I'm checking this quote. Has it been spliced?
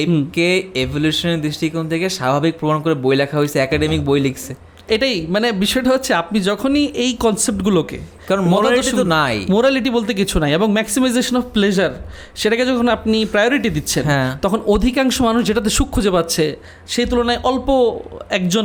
no; 0 cuts

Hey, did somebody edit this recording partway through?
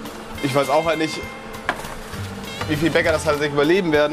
no; 0 cuts

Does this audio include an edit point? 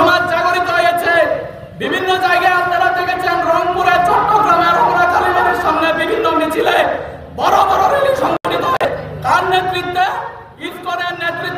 yes; 1 cut; at 8.6 s

